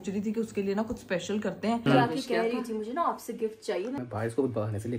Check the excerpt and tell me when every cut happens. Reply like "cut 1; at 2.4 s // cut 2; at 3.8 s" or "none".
cut 1; at 1.8 s // cut 2; at 4.0 s